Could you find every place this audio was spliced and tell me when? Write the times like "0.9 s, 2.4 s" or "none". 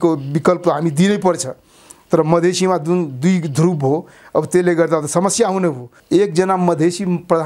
5.9 s